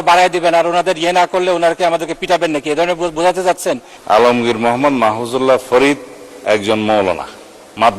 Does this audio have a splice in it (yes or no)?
yes